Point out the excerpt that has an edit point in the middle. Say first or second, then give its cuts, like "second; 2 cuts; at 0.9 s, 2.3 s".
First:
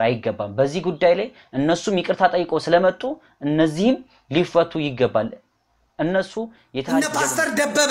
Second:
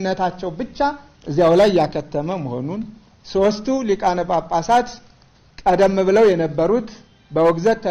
first; 1 cut; at 6.9 s